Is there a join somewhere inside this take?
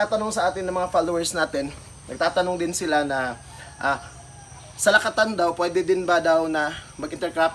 no; 0 cuts

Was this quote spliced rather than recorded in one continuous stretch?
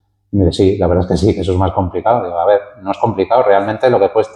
no; 0 cuts

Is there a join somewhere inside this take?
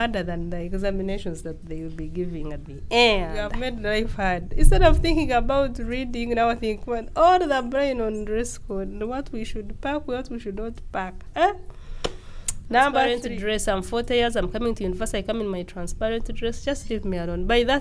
yes; 2 cuts; at 3.6 s, 13.3 s

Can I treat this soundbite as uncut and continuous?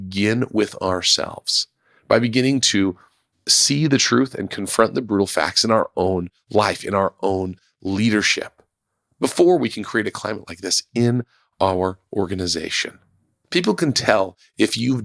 yes; 0 cuts

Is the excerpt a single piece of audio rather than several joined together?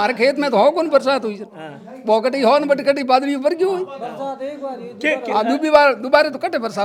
yes; 0 cuts

